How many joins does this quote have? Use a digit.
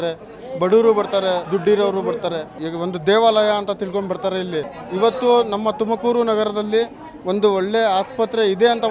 3